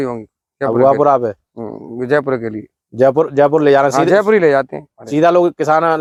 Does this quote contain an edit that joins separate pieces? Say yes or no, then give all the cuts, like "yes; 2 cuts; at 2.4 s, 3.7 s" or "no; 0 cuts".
no; 0 cuts